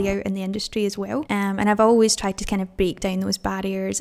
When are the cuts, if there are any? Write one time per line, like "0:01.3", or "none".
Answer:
0:01.3